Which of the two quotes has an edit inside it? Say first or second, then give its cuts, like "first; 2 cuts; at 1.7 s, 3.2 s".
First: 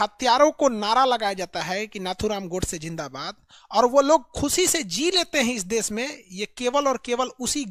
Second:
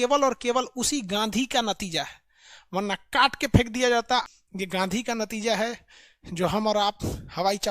second; 1 cut; at 4.3 s